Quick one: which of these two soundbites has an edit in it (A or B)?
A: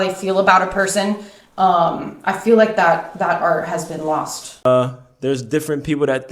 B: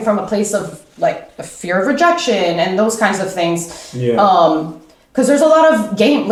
A